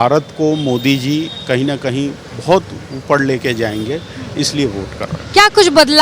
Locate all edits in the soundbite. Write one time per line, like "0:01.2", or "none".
none